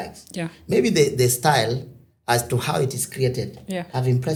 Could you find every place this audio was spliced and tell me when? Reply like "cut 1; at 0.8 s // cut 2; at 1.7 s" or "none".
none